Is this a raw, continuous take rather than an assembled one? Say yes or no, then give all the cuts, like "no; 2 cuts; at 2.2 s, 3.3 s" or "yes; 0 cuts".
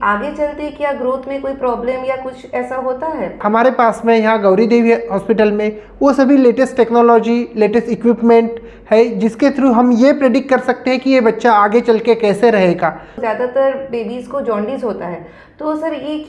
no; 2 cuts; at 3.4 s, 13.1 s